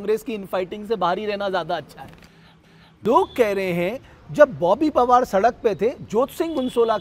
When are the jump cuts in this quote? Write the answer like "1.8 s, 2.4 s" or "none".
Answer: 2.9 s